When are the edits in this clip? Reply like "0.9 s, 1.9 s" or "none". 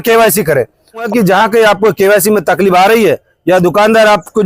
1.1 s